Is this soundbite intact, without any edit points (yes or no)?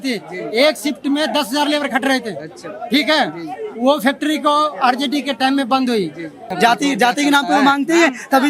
no